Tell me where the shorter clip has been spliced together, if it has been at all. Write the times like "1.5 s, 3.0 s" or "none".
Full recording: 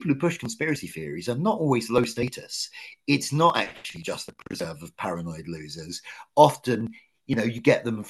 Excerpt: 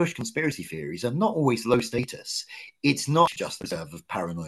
3.3 s